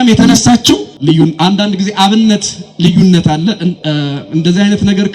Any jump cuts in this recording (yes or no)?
yes